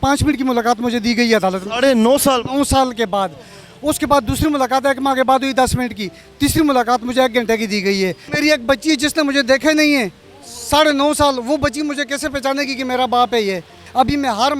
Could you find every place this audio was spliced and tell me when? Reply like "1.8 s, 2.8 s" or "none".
none